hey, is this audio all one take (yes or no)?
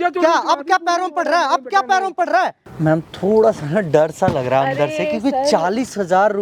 no